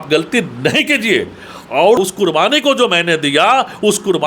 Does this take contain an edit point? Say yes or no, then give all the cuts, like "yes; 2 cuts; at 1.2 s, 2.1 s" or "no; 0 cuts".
yes; 1 cut; at 2.0 s